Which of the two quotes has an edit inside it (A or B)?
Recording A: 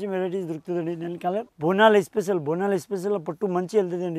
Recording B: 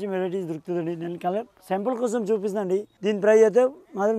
A